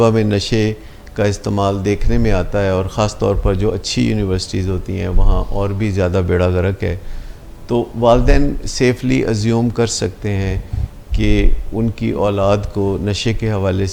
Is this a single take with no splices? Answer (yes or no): yes